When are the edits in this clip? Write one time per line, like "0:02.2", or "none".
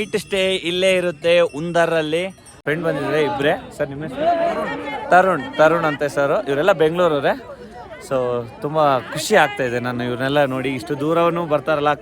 0:02.6